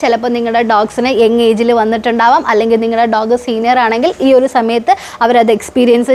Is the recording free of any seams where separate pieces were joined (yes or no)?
yes